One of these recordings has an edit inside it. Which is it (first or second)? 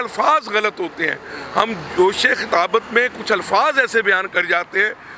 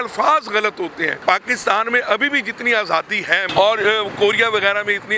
second